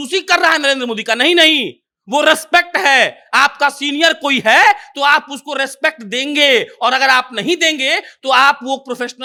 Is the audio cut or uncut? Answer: uncut